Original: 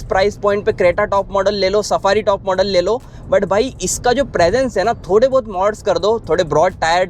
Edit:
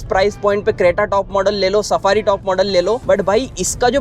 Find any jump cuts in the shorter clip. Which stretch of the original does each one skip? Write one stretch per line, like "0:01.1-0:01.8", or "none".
0:03.0-0:03.2